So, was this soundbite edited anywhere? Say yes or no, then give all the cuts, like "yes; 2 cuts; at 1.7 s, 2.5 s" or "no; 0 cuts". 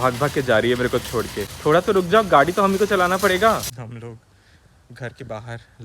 yes; 2 cuts; at 1.4 s, 3.7 s